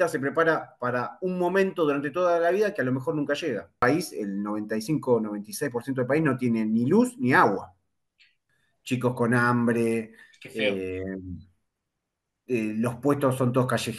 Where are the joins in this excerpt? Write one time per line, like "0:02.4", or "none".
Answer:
0:03.8
0:08.5